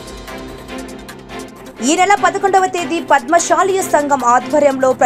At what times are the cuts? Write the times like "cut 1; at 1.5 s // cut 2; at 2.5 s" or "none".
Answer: cut 1; at 1.5 s